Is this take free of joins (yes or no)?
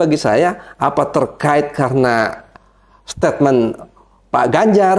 yes